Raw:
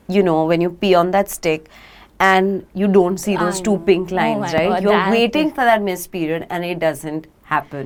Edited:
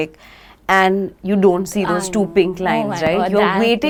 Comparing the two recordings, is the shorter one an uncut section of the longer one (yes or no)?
yes